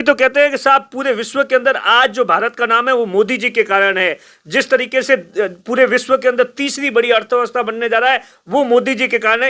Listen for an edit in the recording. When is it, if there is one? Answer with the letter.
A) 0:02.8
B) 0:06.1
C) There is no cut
C